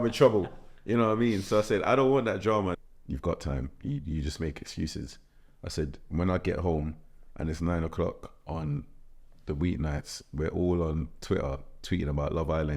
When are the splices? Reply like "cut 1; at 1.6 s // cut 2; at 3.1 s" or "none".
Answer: cut 1; at 2.8 s